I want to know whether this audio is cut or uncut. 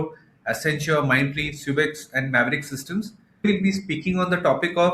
cut